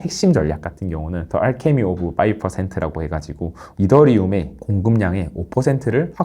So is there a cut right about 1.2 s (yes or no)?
yes